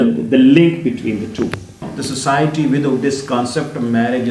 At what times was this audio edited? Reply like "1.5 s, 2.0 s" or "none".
1.9 s